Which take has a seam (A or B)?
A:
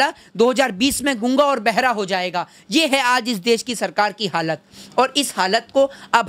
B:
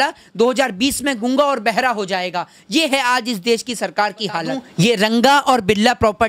B